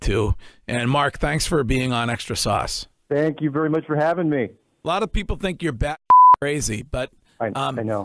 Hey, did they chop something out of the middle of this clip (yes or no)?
yes